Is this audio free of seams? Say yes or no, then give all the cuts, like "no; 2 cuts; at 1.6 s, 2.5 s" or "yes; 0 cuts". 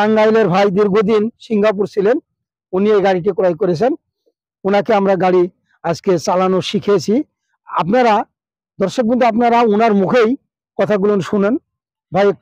yes; 0 cuts